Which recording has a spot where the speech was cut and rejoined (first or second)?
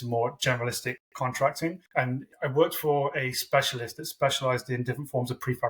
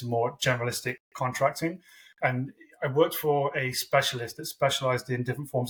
first